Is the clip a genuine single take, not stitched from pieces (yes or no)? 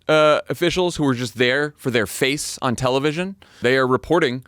no